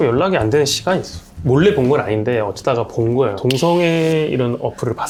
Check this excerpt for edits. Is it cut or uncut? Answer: uncut